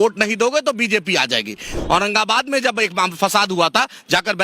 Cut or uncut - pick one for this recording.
cut